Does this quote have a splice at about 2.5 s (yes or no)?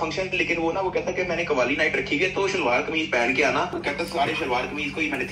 no